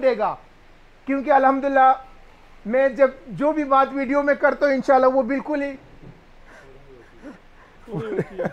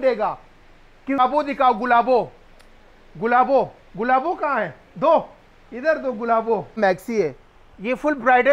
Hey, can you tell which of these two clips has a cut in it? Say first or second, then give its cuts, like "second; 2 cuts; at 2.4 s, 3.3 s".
second; 2 cuts; at 1.2 s, 6.8 s